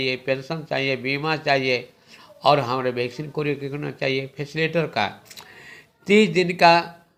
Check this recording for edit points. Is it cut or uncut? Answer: uncut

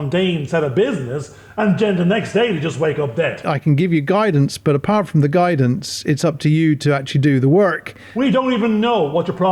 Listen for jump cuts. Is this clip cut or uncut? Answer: cut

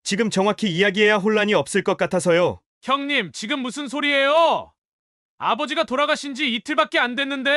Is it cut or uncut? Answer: cut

